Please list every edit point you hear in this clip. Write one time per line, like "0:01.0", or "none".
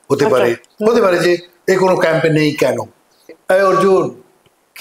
0:03.3